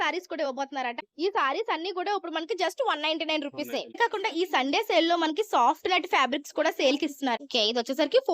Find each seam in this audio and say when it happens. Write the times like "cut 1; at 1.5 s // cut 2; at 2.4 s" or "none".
cut 1; at 1.0 s // cut 2; at 4.0 s // cut 3; at 7.4 s